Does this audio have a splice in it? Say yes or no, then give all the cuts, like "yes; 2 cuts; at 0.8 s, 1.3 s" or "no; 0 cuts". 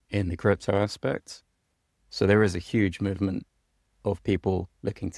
no; 0 cuts